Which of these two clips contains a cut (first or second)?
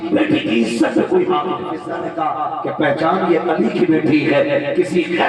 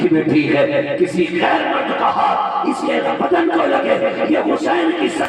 first